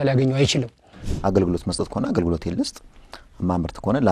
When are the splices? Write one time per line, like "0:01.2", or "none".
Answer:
0:01.0

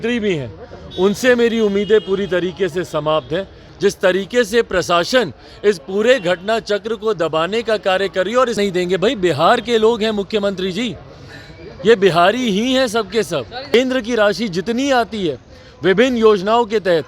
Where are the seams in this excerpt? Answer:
0:03.6
0:08.6
0:13.7

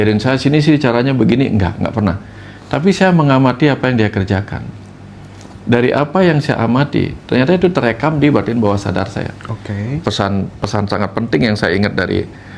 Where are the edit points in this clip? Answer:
0:10.0

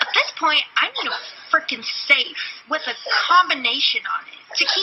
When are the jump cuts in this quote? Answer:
none

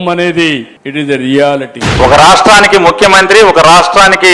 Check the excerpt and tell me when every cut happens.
0:01.8

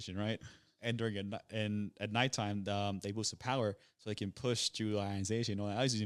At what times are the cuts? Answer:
none

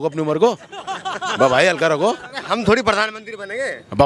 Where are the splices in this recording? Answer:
none

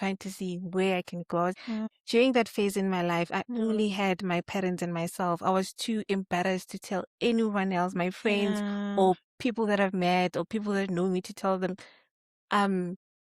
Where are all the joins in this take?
0:01.7

